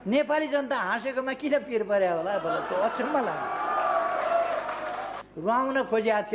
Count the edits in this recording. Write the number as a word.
one